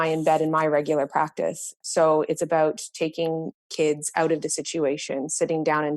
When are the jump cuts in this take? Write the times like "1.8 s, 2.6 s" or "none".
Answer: 1.7 s

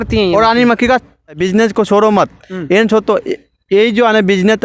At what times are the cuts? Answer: 1.4 s

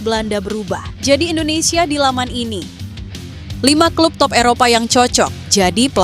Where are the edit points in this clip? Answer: 3.0 s

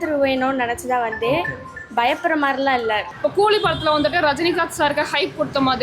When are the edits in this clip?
3.1 s

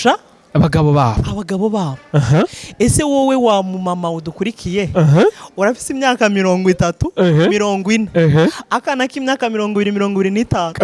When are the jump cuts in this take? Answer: none

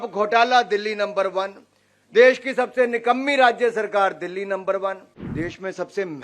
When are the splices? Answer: 5.1 s

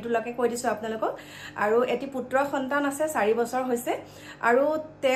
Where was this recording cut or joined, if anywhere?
none

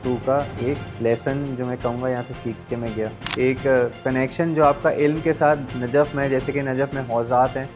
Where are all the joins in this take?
0.9 s, 3.2 s

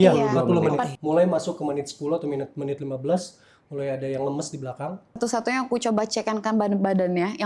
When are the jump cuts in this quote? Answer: 0.9 s, 5.2 s

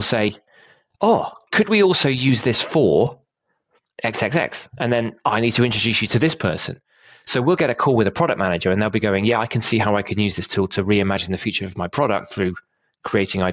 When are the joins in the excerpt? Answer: none

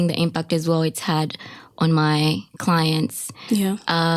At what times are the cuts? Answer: none

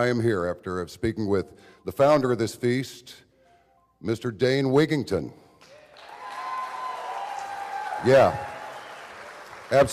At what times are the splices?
8.2 s

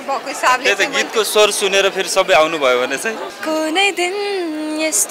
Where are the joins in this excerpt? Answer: 3.3 s

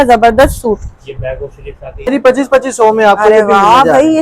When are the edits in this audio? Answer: 2.1 s

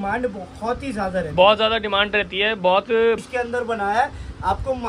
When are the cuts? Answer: 3.2 s

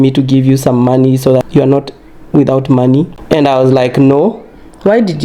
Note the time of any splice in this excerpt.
1.5 s, 3.2 s

